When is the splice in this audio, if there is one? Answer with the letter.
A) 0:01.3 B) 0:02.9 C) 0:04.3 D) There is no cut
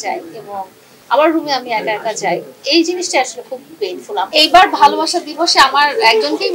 C